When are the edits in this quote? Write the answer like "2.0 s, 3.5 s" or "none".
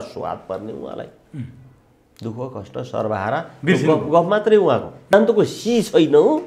4.9 s